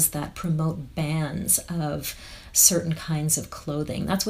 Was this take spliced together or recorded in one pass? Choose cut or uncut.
uncut